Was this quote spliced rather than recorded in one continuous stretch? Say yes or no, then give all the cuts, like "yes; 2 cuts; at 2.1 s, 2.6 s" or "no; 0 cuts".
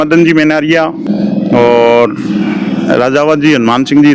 yes; 1 cut; at 1.0 s